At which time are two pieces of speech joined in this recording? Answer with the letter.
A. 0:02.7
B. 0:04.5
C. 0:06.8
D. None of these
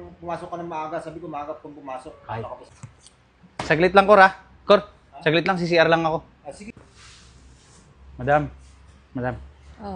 A